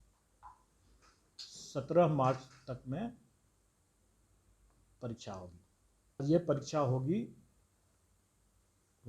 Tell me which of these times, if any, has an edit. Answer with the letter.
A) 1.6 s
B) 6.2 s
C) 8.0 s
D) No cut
B